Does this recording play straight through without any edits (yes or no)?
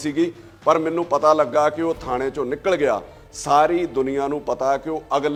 yes